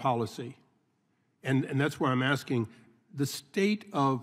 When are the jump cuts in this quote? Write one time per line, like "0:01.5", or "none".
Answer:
none